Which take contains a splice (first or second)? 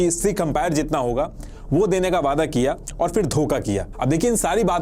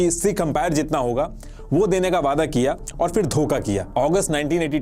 second